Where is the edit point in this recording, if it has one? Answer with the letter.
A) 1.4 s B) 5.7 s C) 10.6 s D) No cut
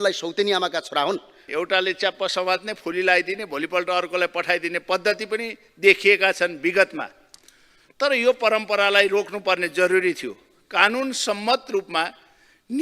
A